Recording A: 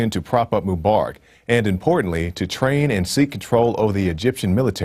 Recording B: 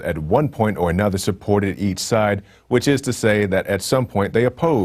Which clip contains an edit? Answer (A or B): B